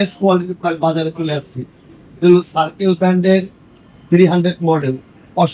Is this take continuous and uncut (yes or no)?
yes